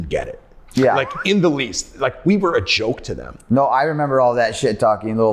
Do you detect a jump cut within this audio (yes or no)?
no